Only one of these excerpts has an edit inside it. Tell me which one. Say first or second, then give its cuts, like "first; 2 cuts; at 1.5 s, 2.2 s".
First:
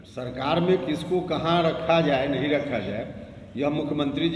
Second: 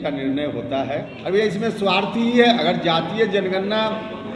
second; 1 cut; at 1.1 s